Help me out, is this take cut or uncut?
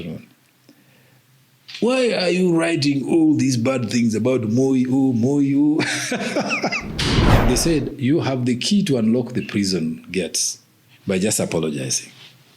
cut